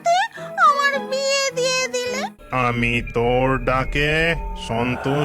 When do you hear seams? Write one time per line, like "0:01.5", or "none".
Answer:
0:02.3

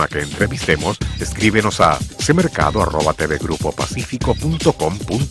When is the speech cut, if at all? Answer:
none

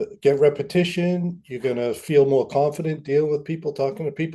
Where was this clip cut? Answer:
none

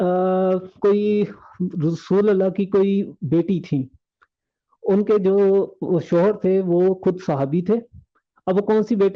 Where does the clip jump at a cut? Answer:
none

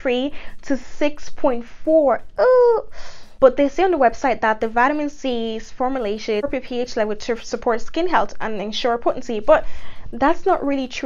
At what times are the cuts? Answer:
none

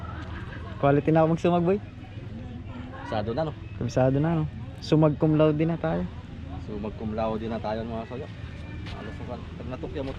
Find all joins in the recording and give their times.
none

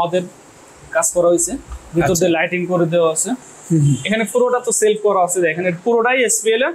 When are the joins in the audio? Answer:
none

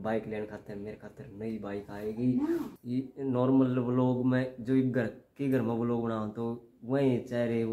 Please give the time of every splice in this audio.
0:02.8

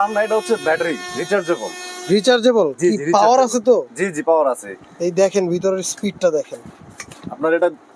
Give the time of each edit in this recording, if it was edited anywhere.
none

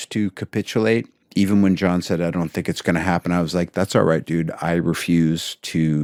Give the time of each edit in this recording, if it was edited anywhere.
none

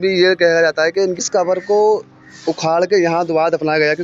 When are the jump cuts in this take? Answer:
0:01.2

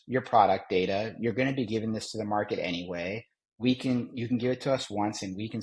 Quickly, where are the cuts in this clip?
none

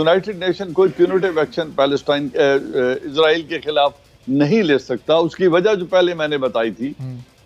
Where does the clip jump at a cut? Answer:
none

